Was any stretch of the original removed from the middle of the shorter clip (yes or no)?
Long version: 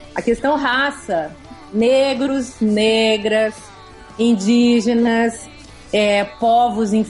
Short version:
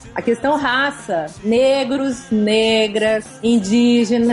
yes